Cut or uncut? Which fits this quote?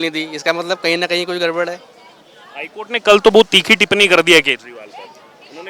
uncut